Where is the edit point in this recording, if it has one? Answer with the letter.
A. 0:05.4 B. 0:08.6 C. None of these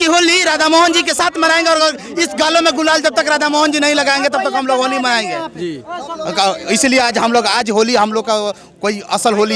C